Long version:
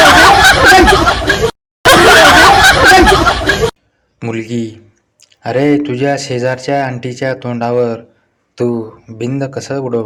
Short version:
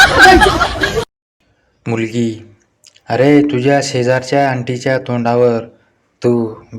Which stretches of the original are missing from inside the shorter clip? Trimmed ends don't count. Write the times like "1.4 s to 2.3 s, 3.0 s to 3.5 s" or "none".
1.8 s to 3.7 s